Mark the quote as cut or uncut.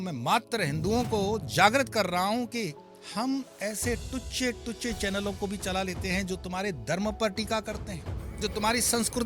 uncut